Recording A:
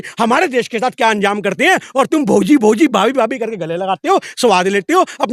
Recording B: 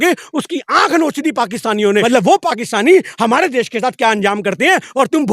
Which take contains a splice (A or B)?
B